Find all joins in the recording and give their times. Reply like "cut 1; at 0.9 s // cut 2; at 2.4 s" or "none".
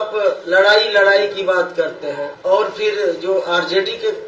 cut 1; at 2.3 s